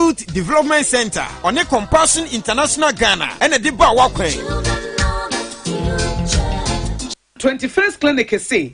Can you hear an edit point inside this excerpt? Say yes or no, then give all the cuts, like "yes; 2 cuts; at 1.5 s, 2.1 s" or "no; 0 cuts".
no; 0 cuts